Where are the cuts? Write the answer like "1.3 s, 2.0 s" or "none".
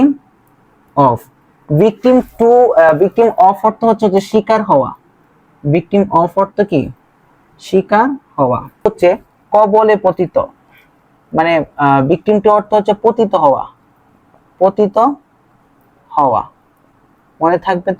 none